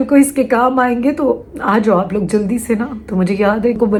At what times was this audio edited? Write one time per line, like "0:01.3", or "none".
none